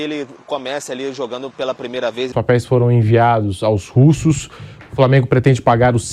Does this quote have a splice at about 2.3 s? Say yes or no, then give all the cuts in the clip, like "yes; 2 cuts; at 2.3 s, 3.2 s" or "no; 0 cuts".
yes; 1 cut; at 2.3 s